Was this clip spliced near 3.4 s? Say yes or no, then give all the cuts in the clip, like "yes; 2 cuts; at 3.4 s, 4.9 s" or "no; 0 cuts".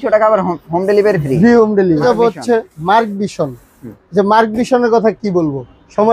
no; 1 cut; at 2.0 s